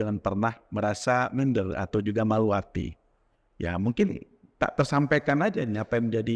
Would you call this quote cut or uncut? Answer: uncut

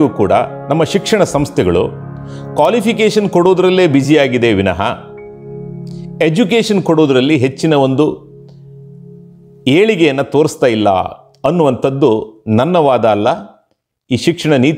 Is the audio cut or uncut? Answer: uncut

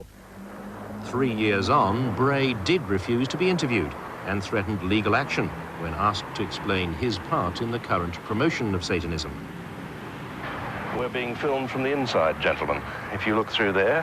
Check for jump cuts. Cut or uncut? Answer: cut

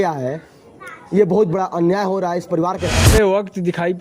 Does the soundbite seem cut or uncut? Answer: cut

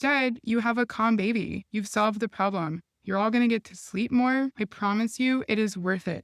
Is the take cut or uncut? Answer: cut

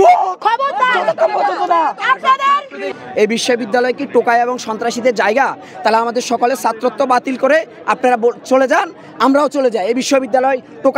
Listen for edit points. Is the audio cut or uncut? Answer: cut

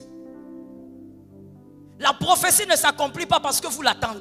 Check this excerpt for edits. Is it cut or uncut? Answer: uncut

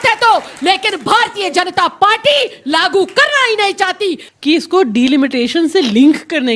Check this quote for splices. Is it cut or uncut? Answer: cut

